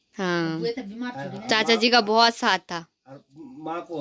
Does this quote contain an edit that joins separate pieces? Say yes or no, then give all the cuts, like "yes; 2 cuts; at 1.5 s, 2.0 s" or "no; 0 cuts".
no; 0 cuts